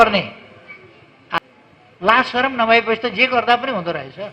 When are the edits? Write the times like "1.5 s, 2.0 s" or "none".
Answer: 1.4 s